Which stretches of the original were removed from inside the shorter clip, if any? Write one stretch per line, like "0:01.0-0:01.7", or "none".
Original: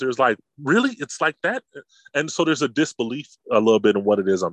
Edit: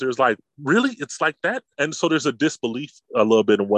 0:01.7-0:02.0